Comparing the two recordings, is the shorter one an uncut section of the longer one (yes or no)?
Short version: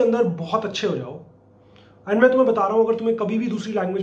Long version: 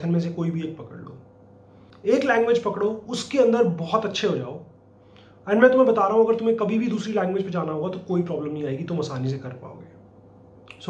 yes